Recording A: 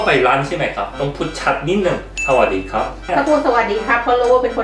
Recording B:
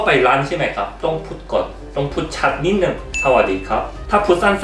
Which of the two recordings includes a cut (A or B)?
A